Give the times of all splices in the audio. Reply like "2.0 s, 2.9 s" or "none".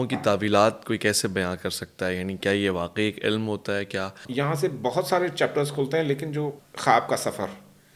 4.2 s, 6.7 s